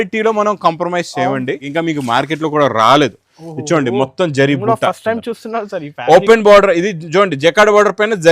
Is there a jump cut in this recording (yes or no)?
yes